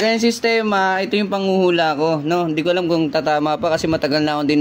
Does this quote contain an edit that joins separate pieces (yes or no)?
no